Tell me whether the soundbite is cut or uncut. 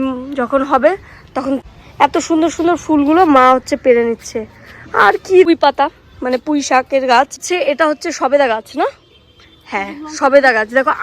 cut